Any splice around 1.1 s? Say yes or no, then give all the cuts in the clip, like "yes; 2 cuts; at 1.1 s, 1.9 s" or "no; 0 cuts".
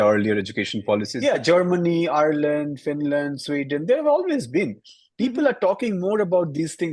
yes; 1 cut; at 1.1 s